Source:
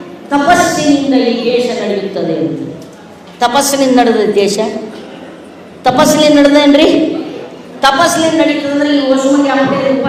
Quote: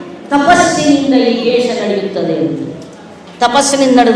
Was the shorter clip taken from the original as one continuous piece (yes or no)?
yes